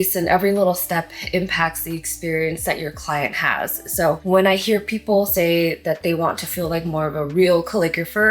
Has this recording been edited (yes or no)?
no